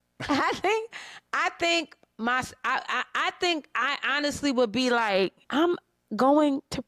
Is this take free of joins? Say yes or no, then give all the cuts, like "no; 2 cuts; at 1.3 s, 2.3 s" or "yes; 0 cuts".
yes; 0 cuts